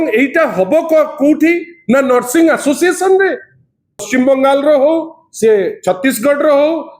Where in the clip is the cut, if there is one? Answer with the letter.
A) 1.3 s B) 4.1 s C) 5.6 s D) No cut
B